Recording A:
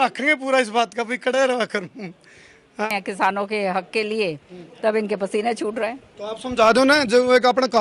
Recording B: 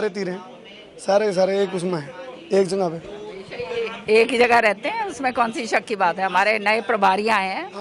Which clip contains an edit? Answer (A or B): A